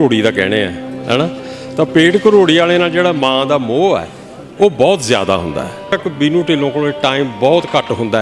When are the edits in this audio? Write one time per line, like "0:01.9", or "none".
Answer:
0:05.9